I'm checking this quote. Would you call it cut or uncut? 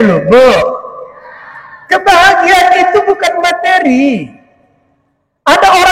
uncut